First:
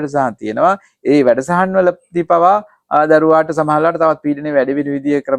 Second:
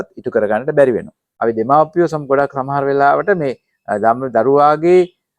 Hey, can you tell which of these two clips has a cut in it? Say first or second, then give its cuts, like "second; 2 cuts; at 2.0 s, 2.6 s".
second; 1 cut; at 1.2 s